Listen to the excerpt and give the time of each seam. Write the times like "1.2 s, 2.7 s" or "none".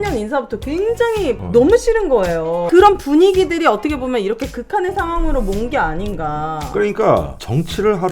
2.6 s